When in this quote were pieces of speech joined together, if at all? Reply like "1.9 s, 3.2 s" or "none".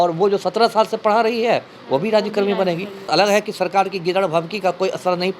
3.1 s